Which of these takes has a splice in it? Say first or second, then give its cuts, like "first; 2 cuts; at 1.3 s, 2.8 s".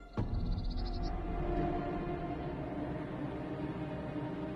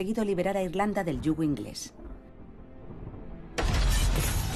second; 1 cut; at 3.7 s